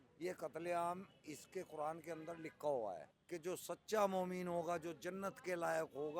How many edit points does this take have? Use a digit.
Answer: 1